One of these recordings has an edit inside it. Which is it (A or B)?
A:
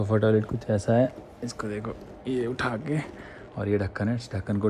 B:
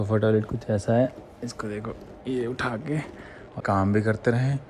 B